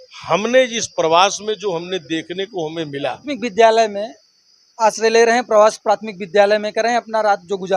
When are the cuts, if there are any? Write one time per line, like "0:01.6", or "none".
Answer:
0:03.2